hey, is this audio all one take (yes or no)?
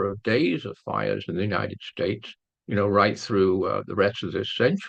yes